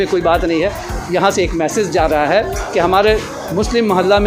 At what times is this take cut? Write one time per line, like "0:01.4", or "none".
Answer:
none